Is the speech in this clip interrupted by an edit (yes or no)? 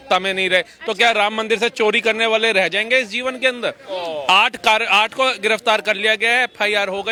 no